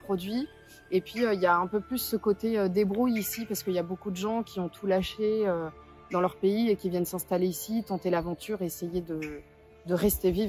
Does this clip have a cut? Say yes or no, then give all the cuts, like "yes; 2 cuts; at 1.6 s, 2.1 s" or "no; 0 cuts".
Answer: no; 0 cuts